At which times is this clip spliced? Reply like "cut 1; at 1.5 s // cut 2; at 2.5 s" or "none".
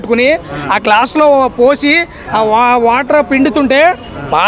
none